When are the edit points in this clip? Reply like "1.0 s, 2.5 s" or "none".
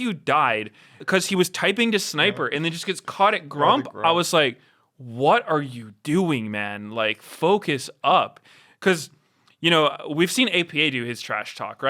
1.0 s

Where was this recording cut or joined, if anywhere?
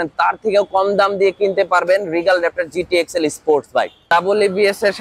4.0 s

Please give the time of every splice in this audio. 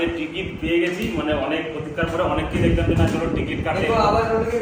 none

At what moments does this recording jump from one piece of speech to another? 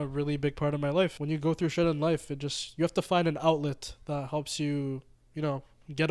1.2 s

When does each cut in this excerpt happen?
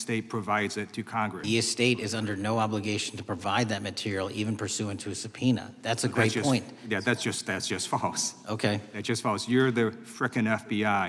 1.4 s

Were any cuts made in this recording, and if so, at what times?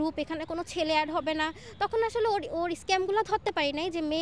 none

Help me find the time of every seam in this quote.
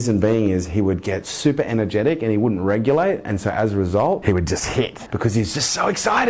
4.7 s

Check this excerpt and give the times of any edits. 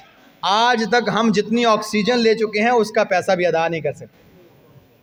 none

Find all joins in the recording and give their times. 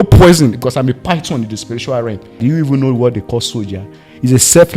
2.4 s

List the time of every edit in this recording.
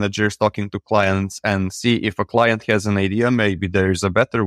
none

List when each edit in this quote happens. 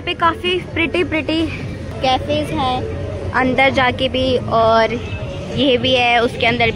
1.9 s

